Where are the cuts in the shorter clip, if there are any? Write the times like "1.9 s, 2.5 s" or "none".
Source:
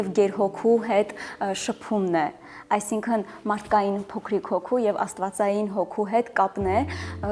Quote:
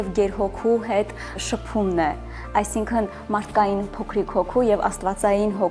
1.4 s